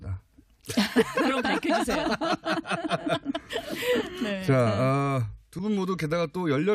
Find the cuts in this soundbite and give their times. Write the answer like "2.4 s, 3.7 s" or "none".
3.1 s

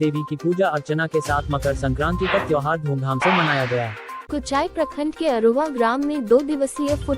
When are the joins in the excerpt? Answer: 4.1 s

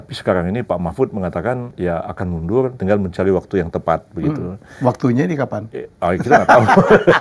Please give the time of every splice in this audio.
1.7 s, 2.8 s

